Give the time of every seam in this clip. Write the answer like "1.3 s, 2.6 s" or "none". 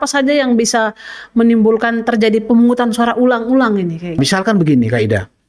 4.2 s